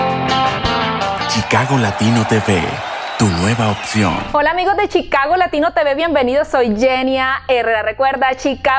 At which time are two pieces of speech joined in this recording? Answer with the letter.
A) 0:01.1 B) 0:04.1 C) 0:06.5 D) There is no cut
A